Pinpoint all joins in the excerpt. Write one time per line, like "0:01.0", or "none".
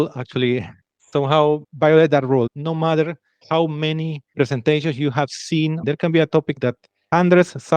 0:02.5
0:05.8